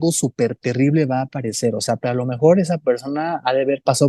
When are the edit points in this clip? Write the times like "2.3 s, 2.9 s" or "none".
2.0 s